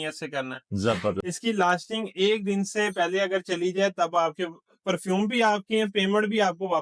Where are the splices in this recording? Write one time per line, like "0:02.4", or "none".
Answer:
0:01.3